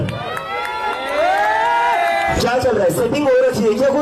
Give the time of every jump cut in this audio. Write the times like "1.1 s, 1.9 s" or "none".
2.4 s